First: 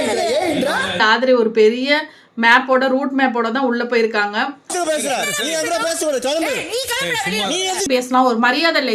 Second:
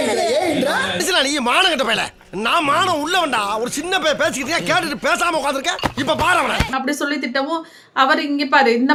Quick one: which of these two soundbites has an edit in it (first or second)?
first